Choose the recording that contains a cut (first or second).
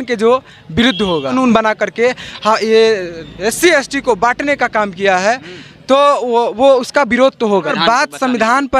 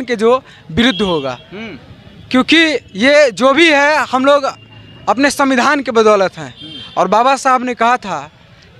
first